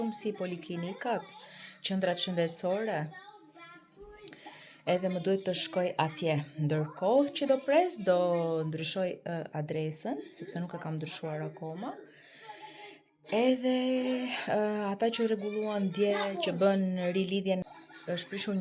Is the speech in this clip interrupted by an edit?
yes; 1 cut; at 17.6 s

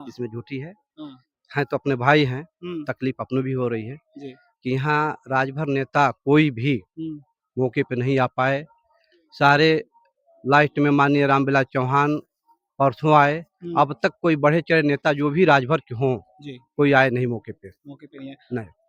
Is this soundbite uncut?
yes; 0 cuts

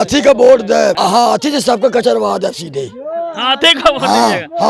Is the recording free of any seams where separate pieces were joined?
no; 1 cut; at 1.0 s

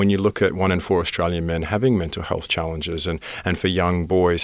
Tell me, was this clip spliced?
no; 0 cuts

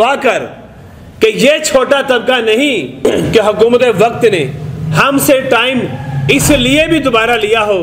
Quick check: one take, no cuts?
no; 1 cut; at 3.1 s

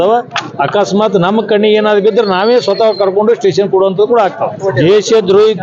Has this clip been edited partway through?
yes; 1 cut; at 4.6 s

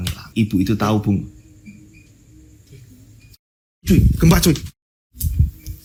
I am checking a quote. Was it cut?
no; 0 cuts

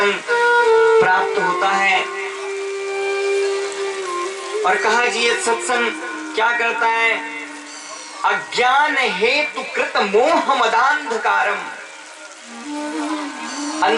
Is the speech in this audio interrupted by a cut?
no; 0 cuts

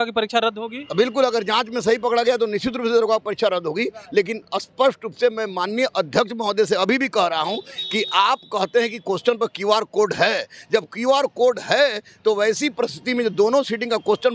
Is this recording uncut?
yes; 0 cuts

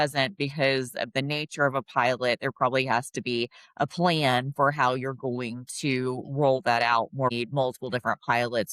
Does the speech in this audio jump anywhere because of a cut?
yes; 1 cut; at 7.3 s

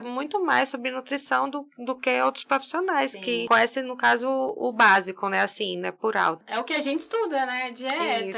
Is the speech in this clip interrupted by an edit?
yes; 2 cuts; at 3.4 s, 6.4 s

